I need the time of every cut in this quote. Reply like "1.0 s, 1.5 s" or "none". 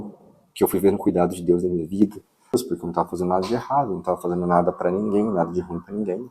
2.5 s